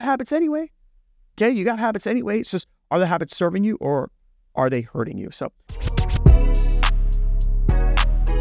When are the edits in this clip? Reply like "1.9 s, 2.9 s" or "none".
5.8 s